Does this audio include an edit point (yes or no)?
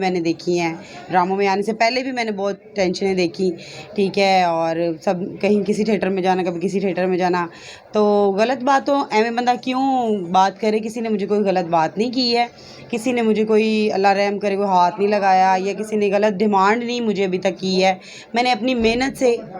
no